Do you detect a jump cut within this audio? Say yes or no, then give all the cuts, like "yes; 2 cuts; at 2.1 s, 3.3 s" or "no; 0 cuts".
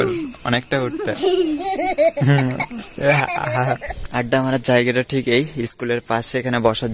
yes; 1 cut; at 4.0 s